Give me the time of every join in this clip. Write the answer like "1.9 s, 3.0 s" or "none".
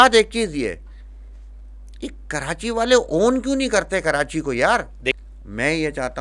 5.1 s

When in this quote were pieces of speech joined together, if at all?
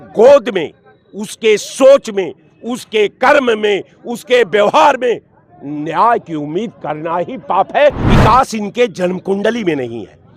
8.1 s

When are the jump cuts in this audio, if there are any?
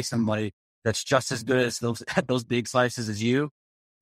none

